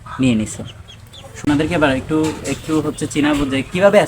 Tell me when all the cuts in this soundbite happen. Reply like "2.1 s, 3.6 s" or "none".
1.4 s